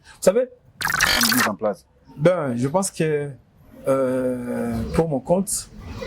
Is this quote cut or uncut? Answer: cut